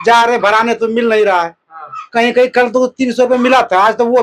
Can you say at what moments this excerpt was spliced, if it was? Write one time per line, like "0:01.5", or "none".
none